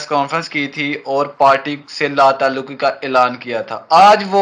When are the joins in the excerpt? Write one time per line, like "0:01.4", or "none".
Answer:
none